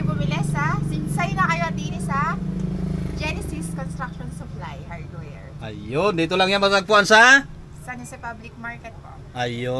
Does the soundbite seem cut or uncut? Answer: uncut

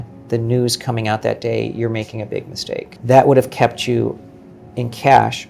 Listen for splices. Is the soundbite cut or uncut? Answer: cut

